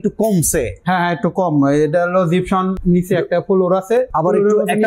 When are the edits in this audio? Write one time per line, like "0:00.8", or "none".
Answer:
0:02.8
0:04.1